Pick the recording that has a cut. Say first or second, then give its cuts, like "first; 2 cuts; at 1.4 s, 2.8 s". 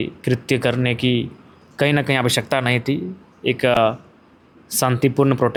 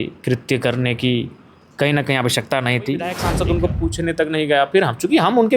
second; 1 cut; at 3.2 s